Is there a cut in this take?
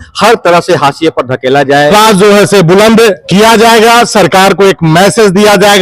yes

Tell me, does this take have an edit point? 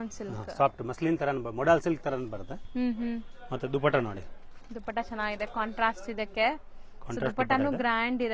no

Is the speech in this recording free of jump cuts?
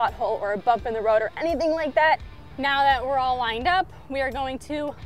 no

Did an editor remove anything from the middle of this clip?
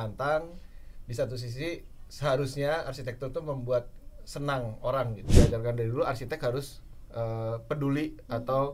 yes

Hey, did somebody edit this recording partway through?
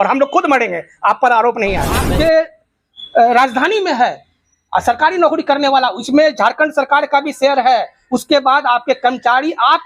yes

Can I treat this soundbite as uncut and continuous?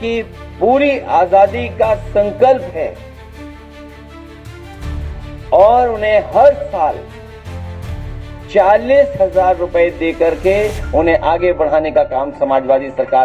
yes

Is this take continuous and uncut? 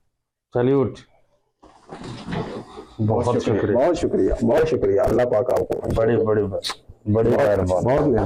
yes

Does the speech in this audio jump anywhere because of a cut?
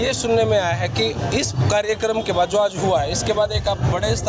no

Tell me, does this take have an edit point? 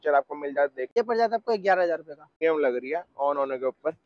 yes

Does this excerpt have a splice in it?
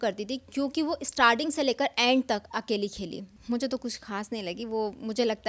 yes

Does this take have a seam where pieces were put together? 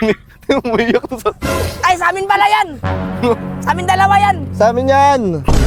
no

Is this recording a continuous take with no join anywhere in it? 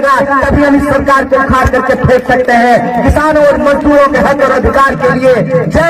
yes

